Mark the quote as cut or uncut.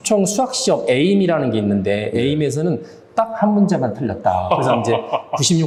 uncut